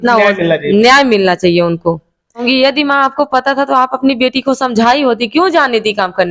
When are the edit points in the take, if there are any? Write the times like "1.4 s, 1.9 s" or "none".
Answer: 2.4 s